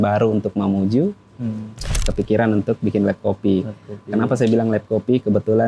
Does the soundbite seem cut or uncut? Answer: cut